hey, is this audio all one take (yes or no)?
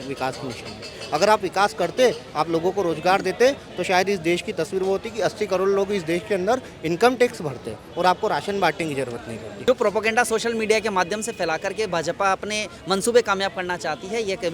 no